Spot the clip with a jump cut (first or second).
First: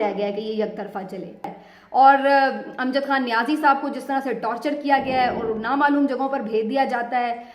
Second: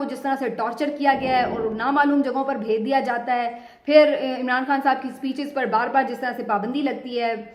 first